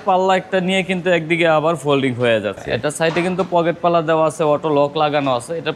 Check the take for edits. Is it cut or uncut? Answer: cut